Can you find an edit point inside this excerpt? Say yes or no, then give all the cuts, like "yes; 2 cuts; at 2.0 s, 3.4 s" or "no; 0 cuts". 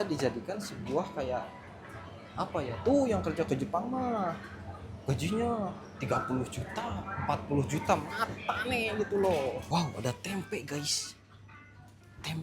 yes; 1 cut; at 9.6 s